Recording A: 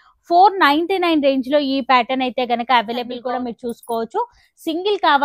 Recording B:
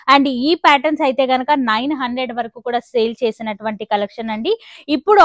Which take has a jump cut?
A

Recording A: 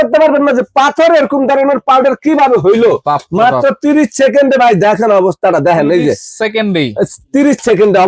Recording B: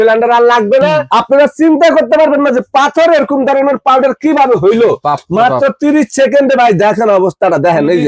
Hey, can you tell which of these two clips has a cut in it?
B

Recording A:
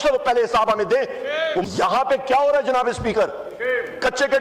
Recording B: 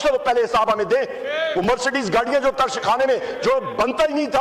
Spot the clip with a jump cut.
A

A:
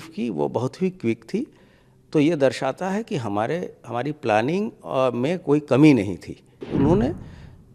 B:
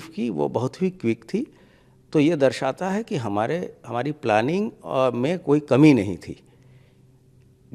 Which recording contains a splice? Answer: A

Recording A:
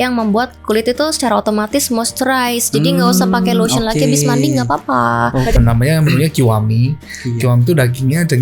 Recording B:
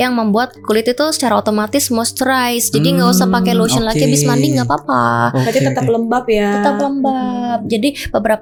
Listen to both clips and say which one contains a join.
A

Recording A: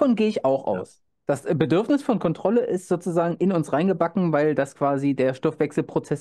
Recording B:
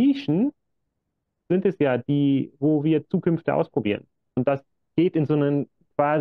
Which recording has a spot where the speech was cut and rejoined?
B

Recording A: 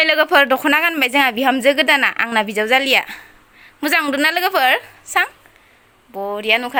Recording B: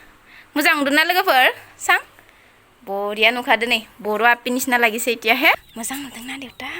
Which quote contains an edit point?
B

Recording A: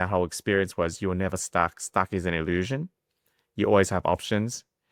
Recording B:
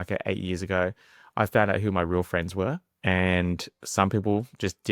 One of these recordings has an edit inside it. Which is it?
B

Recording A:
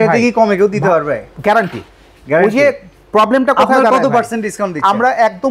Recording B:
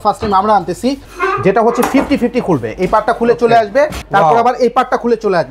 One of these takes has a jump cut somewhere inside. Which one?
B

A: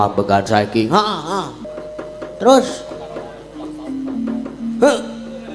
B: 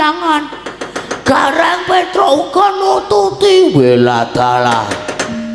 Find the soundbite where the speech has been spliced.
A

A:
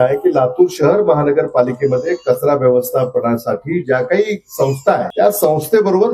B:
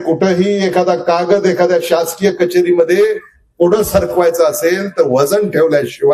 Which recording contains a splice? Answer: A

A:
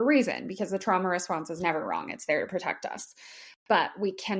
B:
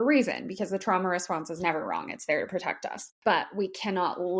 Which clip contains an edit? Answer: B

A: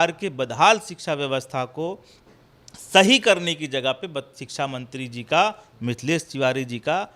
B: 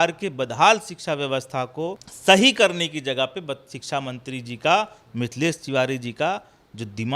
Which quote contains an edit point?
B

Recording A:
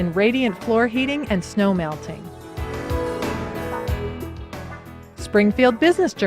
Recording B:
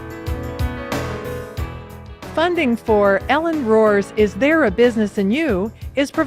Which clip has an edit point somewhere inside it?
A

